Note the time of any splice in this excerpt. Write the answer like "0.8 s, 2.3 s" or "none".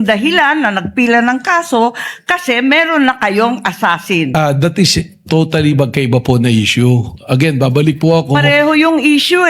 4.3 s

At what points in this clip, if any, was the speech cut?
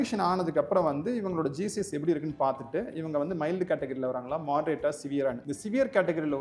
none

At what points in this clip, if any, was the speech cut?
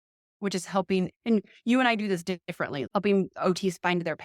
2.8 s

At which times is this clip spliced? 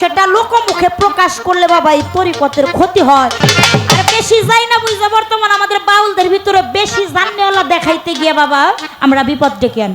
3.4 s

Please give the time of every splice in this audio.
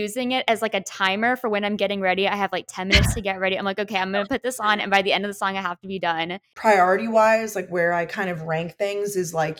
6.5 s

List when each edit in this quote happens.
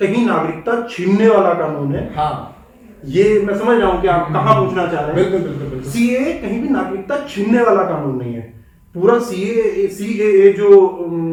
none

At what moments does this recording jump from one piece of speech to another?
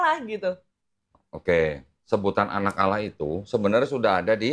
none

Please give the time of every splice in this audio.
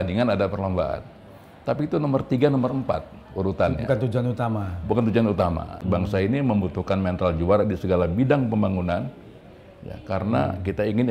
5.8 s

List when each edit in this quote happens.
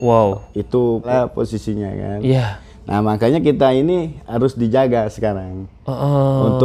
1.1 s

